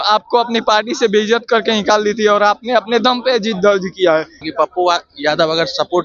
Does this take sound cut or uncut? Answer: cut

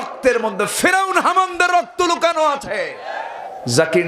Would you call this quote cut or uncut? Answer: cut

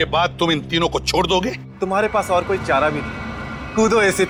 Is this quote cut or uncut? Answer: uncut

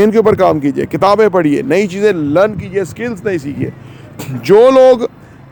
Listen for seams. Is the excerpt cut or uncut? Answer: uncut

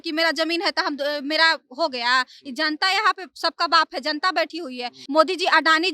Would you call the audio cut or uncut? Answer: cut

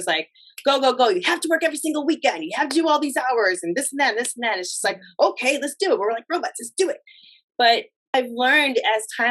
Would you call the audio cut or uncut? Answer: cut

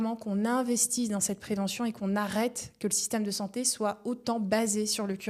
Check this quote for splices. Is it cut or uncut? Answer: uncut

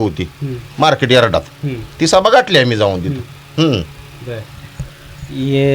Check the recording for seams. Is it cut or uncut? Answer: uncut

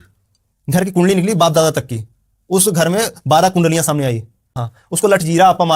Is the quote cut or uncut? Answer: cut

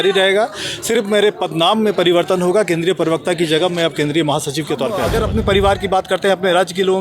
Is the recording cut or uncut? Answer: cut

